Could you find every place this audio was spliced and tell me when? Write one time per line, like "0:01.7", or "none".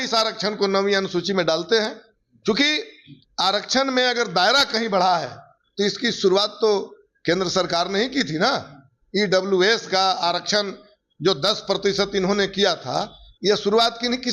none